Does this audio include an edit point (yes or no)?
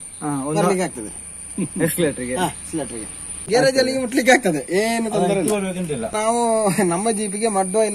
no